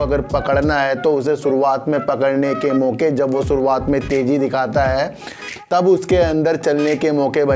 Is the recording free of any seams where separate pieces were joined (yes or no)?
yes